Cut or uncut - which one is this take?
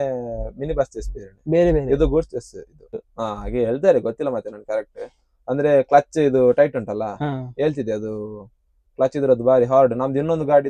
cut